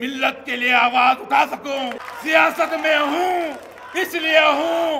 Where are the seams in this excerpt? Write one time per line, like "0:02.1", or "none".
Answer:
0:02.1